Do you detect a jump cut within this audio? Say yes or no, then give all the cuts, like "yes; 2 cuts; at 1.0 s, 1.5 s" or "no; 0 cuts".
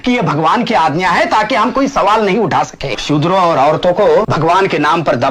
yes; 2 cuts; at 3.0 s, 4.3 s